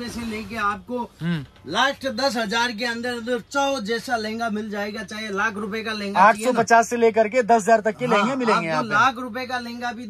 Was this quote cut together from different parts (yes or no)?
no